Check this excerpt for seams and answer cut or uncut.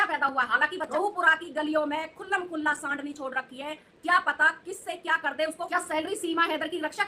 cut